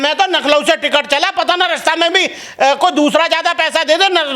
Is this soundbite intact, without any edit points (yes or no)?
yes